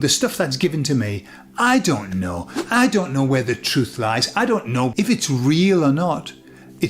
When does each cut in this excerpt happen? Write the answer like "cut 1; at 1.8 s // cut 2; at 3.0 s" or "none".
cut 1; at 4.9 s